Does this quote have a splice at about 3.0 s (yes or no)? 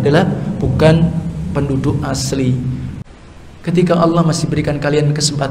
yes